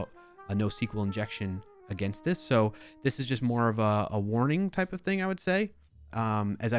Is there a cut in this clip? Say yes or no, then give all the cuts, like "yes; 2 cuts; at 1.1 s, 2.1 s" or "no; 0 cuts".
no; 0 cuts